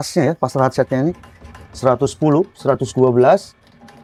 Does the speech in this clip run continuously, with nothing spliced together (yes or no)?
yes